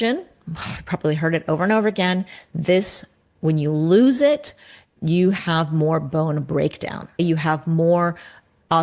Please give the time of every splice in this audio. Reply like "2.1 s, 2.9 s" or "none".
4.9 s, 7.2 s